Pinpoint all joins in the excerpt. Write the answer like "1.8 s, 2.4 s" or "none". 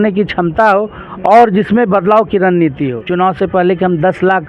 3.0 s